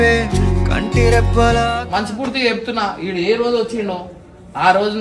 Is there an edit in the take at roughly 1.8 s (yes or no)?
yes